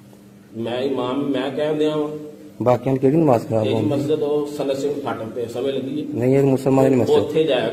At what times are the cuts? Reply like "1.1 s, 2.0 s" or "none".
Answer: none